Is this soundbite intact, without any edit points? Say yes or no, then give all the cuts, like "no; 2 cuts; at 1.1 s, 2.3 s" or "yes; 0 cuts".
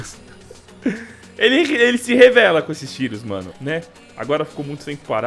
no; 1 cut; at 3.4 s